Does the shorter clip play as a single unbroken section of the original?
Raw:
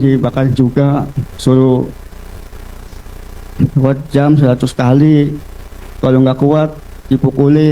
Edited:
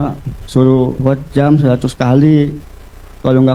no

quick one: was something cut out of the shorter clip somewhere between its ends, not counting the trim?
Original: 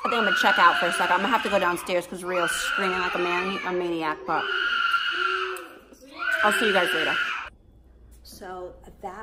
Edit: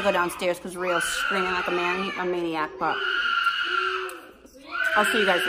no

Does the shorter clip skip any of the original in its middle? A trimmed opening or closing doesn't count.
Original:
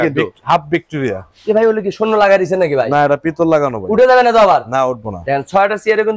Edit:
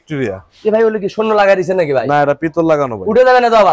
no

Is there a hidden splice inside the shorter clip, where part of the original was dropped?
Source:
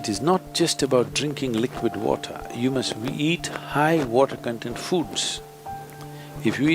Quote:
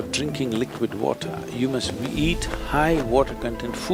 no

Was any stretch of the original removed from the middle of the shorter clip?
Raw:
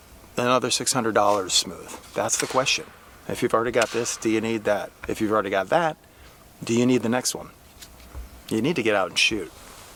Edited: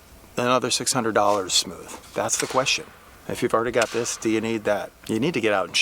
yes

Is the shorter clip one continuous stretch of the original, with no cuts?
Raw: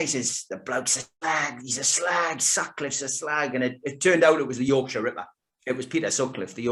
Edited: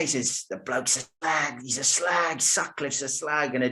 yes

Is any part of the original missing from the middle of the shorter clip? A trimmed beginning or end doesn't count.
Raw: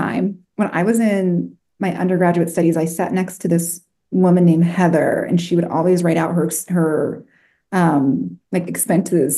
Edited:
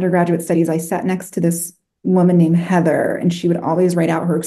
no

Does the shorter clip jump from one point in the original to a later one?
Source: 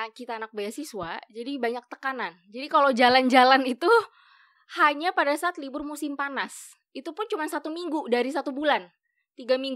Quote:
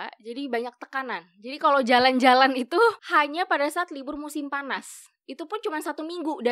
yes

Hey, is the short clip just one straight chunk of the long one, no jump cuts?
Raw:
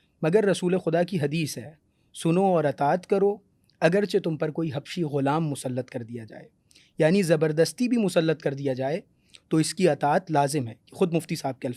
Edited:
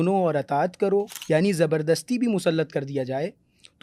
no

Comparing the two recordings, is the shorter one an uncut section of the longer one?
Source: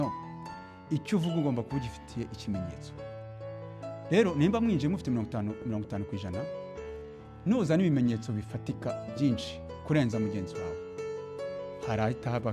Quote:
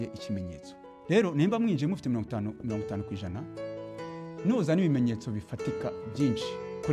no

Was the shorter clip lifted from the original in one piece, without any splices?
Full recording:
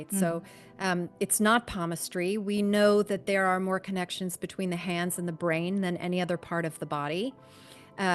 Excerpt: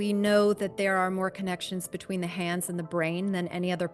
yes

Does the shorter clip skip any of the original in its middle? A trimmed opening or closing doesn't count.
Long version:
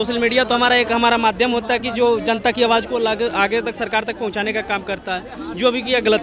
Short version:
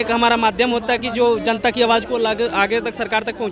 no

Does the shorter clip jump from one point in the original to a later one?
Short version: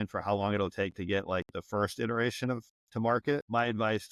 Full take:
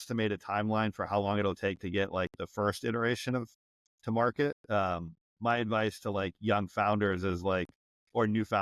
yes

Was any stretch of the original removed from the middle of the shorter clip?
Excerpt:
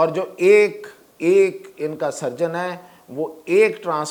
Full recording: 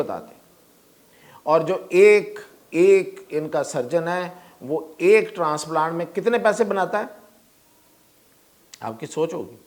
no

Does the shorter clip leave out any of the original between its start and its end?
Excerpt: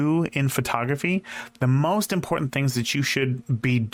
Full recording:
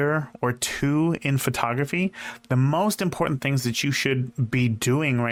no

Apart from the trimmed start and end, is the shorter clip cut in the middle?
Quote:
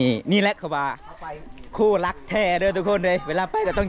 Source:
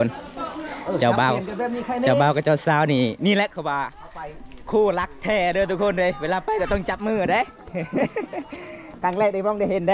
no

